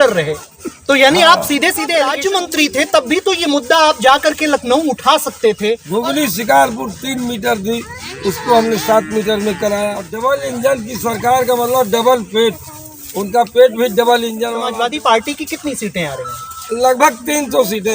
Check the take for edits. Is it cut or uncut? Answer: cut